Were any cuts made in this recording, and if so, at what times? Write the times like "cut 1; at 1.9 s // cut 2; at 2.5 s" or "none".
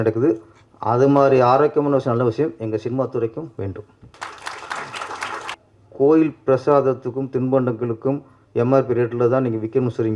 cut 1; at 4.0 s // cut 2; at 5.5 s